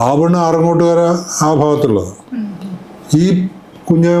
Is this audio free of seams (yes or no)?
yes